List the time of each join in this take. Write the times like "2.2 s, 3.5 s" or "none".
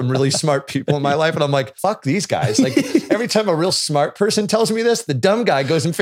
1.7 s